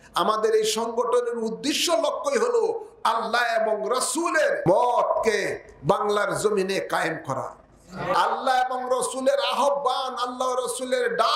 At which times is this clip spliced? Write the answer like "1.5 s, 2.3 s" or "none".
4.6 s, 8.1 s

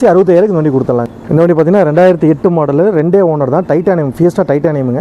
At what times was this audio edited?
1.2 s

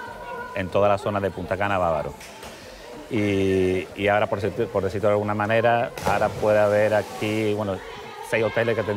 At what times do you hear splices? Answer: none

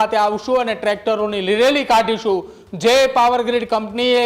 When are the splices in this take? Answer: none

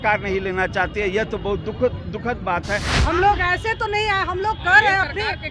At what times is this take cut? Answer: 2.9 s

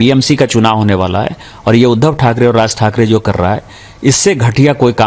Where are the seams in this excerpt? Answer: none

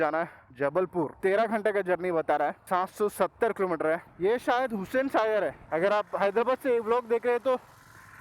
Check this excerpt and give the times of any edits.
4.0 s, 5.6 s

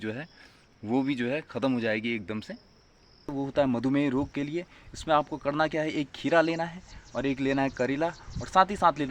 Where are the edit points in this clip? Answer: 3.3 s

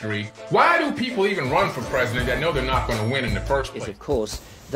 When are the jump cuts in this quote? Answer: 3.7 s

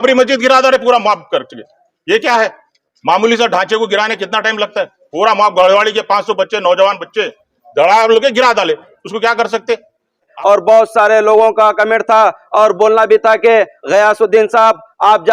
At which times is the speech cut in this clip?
10.3 s

